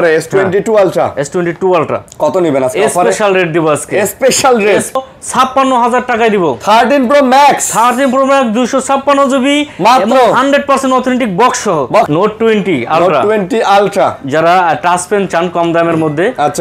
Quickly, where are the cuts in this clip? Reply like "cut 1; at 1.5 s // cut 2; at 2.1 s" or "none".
cut 1; at 5.0 s // cut 2; at 12.1 s